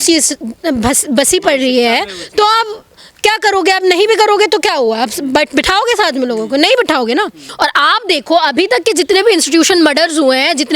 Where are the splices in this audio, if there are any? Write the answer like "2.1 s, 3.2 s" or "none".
7.5 s